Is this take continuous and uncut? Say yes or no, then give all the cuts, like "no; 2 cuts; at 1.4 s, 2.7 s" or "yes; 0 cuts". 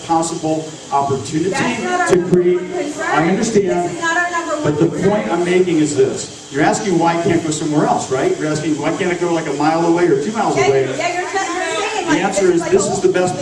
yes; 0 cuts